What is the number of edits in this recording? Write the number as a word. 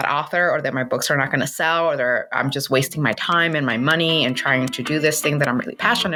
zero